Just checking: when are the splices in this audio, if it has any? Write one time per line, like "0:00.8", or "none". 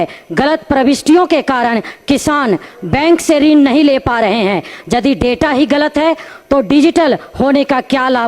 none